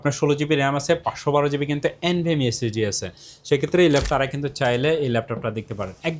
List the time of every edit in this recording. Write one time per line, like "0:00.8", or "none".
0:04.0